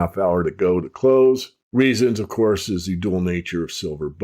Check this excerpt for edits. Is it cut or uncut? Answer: cut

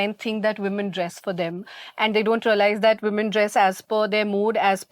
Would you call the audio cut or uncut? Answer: uncut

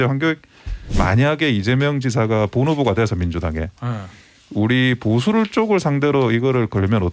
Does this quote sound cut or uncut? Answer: cut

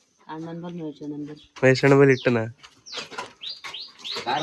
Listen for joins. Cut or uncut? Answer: uncut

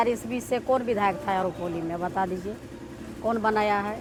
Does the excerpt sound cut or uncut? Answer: uncut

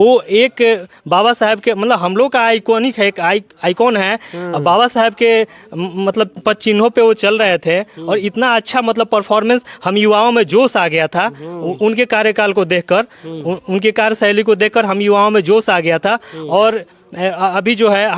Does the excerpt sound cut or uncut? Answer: uncut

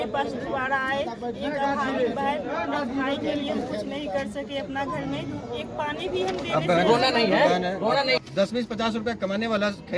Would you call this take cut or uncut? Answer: cut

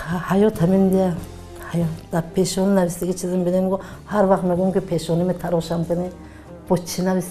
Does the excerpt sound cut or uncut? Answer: uncut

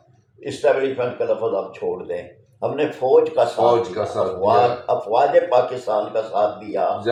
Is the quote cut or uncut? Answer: uncut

